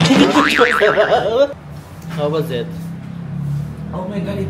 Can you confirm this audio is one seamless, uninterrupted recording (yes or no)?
no